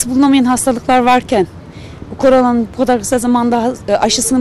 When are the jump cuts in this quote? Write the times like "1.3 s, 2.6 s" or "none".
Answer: none